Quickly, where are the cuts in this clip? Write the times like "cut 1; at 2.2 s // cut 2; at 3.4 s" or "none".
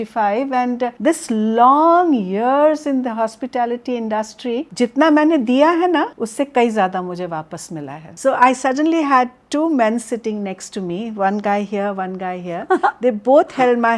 cut 1; at 1.0 s // cut 2; at 4.7 s // cut 3; at 6.2 s // cut 4; at 8.1 s